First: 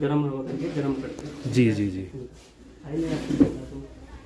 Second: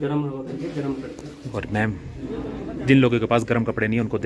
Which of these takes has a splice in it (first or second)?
second